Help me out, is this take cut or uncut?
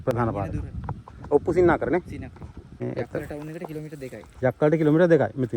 cut